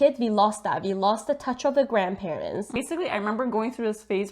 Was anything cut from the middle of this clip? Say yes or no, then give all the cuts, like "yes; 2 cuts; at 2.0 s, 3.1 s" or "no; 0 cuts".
yes; 1 cut; at 2.8 s